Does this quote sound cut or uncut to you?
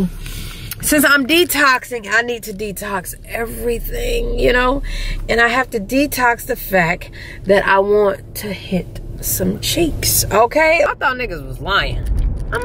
cut